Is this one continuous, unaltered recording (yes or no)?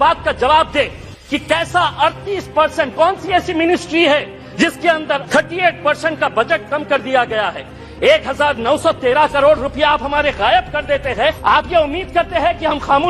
no